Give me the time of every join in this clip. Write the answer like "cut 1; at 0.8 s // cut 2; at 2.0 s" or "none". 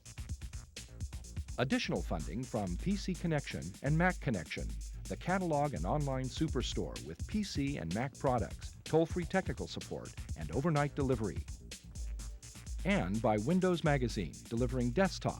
cut 1; at 1.5 s

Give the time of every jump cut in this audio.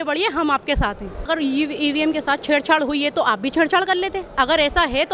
cut 1; at 1.2 s

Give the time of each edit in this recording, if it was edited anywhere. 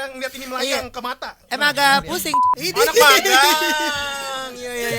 cut 1; at 2.4 s

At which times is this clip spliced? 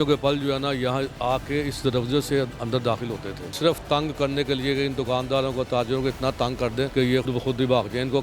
cut 1; at 3.6 s // cut 2; at 7.2 s

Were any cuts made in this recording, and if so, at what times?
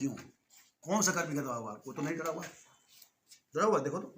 none

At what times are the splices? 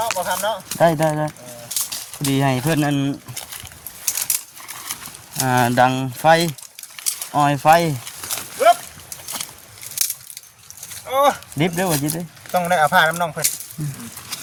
none

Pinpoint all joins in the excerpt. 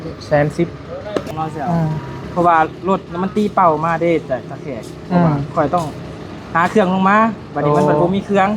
cut 1; at 1.3 s

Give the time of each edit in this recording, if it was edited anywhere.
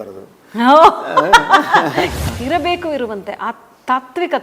cut 1; at 2.2 s

